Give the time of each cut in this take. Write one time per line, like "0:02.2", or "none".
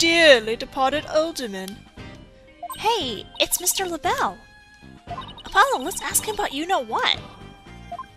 0:05.8